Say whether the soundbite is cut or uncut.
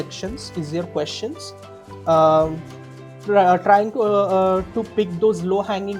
uncut